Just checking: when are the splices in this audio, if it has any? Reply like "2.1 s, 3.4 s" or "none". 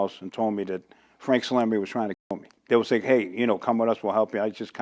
none